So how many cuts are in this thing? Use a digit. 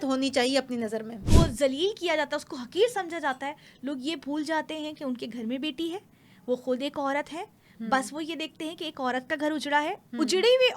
1